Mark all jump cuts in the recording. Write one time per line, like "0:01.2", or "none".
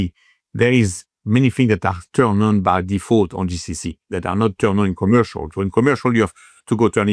none